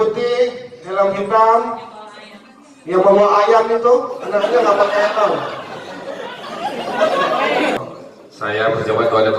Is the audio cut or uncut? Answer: cut